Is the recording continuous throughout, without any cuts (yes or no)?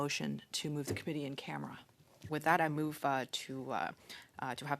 no